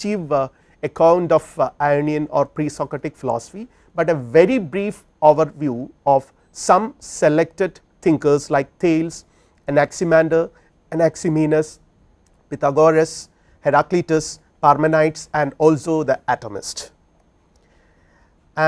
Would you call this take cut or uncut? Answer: cut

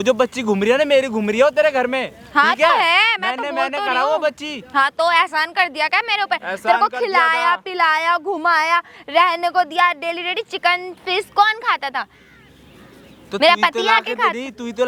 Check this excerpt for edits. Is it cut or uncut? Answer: uncut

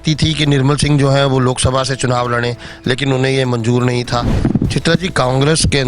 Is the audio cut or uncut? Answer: cut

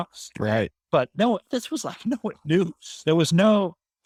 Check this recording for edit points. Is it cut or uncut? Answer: uncut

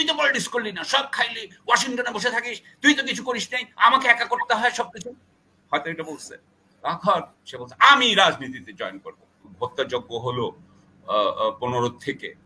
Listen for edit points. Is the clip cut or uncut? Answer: cut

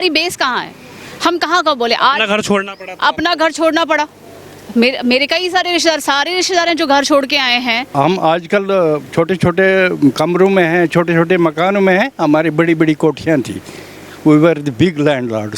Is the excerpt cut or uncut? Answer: cut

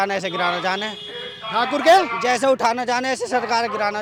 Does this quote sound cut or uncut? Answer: uncut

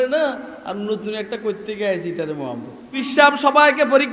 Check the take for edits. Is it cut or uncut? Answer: cut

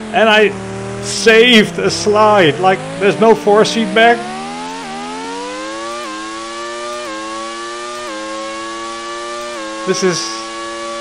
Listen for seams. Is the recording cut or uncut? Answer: uncut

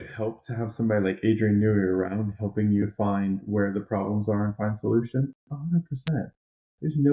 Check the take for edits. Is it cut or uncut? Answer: uncut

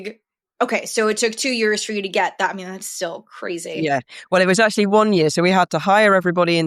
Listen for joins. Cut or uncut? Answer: uncut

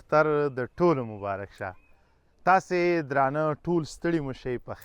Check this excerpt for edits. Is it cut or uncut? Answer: uncut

